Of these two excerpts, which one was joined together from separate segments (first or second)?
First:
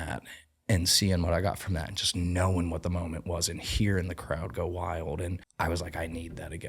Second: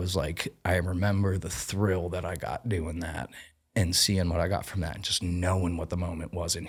first